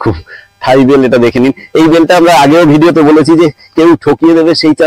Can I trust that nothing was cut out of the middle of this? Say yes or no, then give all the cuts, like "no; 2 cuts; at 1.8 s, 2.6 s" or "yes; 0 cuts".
yes; 0 cuts